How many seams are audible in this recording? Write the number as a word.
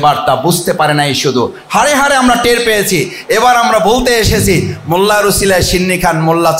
zero